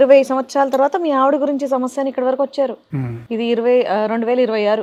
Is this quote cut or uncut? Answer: uncut